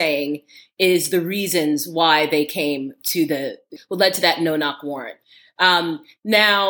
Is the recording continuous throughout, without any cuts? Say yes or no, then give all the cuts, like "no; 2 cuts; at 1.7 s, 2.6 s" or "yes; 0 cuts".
no; 1 cut; at 3.7 s